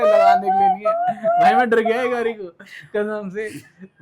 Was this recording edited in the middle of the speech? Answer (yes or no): no